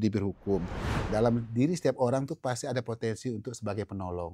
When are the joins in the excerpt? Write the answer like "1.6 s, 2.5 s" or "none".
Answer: 1.0 s